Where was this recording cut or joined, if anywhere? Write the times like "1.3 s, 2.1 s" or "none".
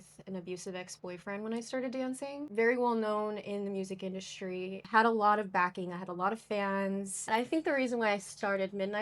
2.4 s, 4.9 s, 7.1 s